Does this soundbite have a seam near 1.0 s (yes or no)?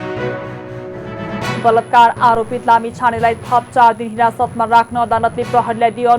yes